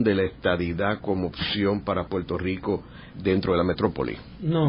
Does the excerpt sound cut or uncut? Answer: uncut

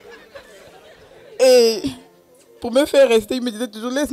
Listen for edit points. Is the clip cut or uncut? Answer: cut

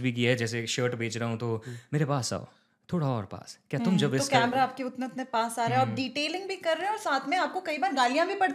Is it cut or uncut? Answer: uncut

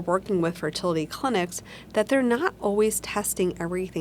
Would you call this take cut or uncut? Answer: uncut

